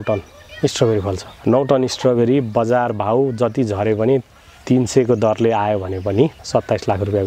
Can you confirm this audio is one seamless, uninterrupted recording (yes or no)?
no